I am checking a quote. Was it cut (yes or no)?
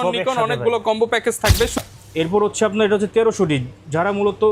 yes